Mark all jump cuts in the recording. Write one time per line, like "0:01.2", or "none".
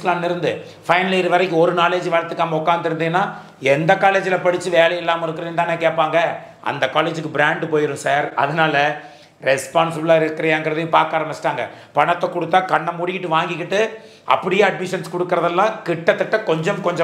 none